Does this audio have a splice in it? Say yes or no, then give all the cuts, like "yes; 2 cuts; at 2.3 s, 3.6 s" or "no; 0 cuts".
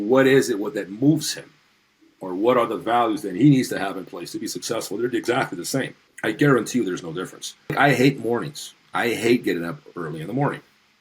yes; 2 cuts; at 6.0 s, 7.7 s